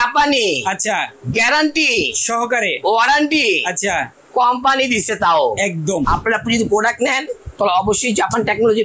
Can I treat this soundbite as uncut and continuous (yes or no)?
no